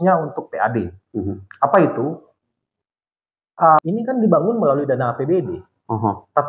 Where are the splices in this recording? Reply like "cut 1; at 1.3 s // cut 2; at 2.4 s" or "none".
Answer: cut 1; at 3.8 s